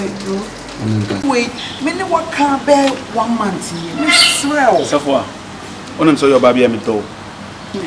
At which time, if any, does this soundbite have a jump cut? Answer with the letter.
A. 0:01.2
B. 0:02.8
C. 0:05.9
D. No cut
A